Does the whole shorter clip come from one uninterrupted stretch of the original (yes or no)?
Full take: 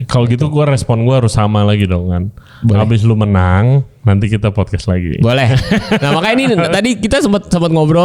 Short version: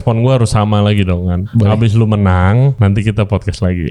no